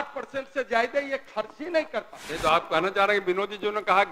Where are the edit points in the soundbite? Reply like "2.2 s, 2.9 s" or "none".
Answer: 2.3 s

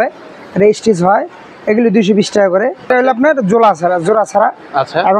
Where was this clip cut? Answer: 2.9 s

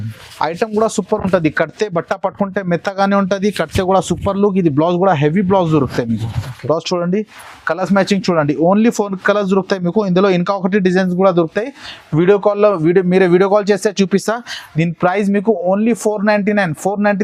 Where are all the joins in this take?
none

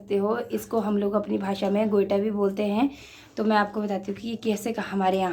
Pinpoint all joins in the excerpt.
none

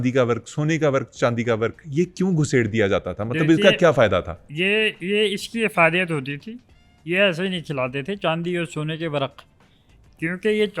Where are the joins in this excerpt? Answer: none

